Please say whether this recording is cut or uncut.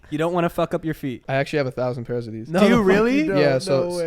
cut